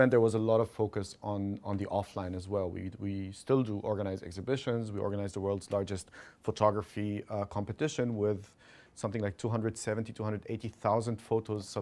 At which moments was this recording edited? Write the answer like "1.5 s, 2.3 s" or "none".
none